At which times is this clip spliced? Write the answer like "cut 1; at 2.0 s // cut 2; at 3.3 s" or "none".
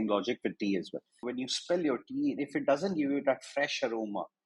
cut 1; at 1.3 s